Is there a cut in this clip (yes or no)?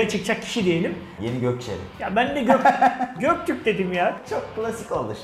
yes